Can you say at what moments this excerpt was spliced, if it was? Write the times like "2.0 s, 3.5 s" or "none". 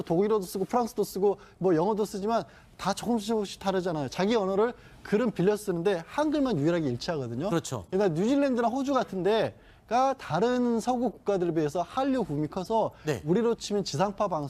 none